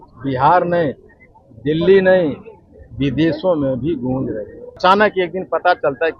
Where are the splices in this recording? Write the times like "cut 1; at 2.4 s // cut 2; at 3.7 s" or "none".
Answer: cut 1; at 4.8 s